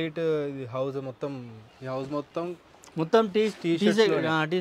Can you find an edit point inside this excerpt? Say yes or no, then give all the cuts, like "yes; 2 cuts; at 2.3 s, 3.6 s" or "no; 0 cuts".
no; 0 cuts